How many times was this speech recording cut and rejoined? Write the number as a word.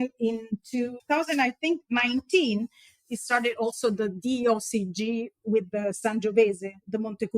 one